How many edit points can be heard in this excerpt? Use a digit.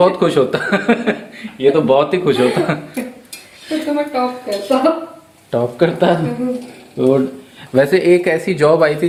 0